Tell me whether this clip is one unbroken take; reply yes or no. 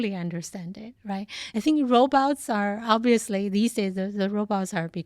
no